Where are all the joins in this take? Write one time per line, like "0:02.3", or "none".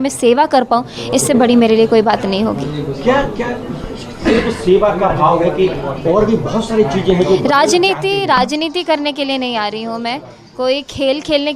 none